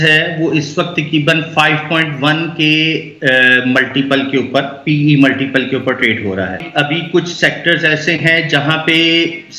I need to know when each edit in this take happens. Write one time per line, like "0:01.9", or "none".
0:06.7